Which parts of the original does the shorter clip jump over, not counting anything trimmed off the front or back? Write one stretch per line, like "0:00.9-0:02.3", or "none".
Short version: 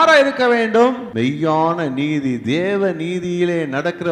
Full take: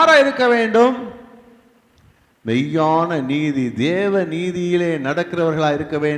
0:01.0-0:02.4